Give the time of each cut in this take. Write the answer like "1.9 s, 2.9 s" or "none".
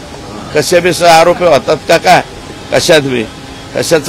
none